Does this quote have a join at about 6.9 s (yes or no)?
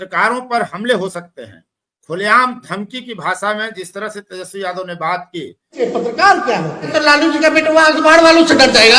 yes